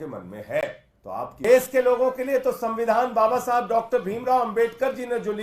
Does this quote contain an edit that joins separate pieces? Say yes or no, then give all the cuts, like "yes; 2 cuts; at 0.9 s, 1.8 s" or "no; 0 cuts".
yes; 1 cut; at 1.4 s